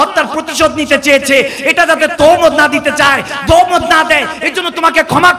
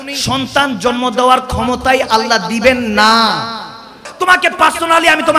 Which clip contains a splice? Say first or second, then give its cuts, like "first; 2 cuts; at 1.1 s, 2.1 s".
second; 1 cut; at 4.1 s